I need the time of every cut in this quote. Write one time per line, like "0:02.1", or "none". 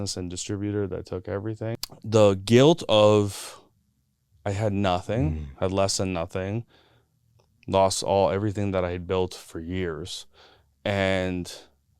0:01.8